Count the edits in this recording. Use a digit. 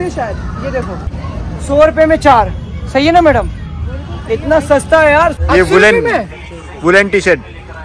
2